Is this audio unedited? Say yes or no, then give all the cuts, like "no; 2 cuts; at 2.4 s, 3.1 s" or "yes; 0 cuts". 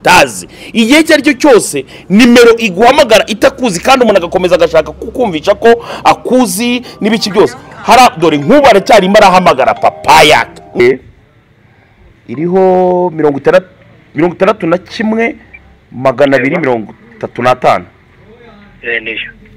no; 1 cut; at 10.8 s